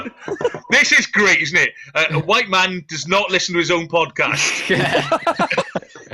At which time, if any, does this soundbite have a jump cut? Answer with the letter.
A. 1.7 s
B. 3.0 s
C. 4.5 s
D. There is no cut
D